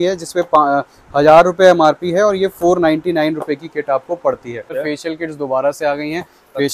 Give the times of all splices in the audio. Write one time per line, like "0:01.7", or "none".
0:04.7